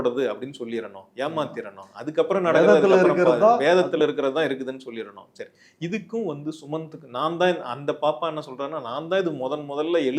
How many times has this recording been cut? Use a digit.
0